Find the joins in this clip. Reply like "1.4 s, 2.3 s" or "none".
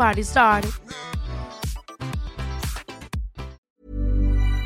3.6 s